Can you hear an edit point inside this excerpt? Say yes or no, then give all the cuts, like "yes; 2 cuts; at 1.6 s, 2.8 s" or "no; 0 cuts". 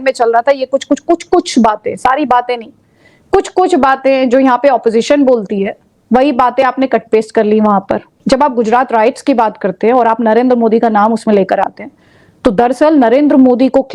yes; 1 cut; at 8.2 s